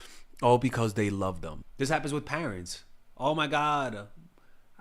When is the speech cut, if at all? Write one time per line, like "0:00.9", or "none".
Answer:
0:01.6